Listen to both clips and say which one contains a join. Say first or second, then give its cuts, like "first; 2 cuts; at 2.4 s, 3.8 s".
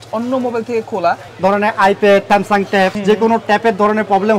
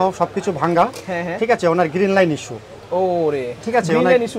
first; 2 cuts; at 1.3 s, 2.7 s